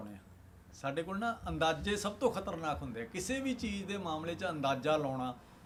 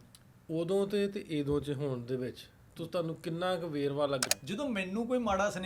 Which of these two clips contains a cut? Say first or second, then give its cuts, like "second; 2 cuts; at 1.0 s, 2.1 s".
second; 1 cut; at 4.2 s